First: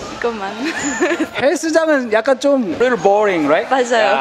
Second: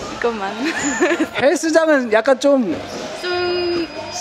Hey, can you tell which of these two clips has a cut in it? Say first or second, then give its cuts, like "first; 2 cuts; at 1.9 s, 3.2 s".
first; 1 cut; at 2.8 s